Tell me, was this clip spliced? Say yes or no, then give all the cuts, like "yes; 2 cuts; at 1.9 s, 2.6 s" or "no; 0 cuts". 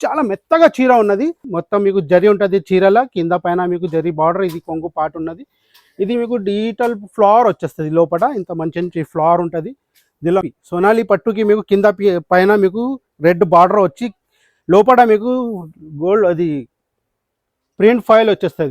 yes; 2 cuts; at 1.5 s, 10.5 s